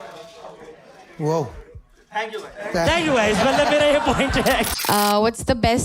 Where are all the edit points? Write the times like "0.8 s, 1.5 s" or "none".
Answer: 4.7 s